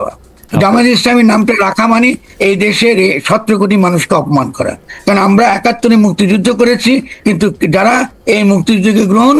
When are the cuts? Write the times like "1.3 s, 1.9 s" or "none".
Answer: none